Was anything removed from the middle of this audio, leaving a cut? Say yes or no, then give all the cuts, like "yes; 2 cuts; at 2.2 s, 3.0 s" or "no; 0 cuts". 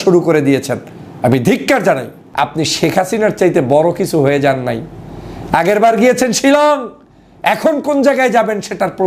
yes; 1 cut; at 2.2 s